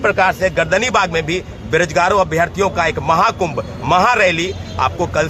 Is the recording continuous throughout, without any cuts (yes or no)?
yes